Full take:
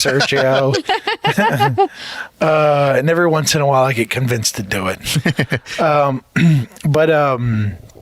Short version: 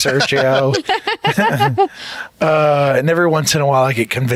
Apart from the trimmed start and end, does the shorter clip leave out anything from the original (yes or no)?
no